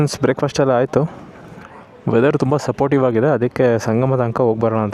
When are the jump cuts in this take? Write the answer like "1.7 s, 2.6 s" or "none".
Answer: none